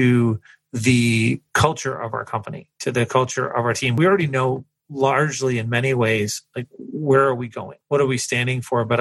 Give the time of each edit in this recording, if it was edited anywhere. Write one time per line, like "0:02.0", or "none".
0:04.0
0:07.7